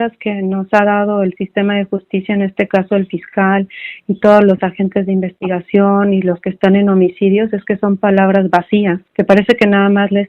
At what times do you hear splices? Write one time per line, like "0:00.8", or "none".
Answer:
0:09.0